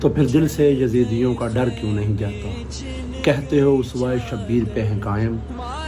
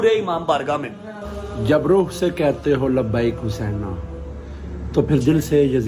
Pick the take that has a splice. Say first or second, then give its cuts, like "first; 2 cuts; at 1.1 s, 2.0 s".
second; 1 cut; at 1.2 s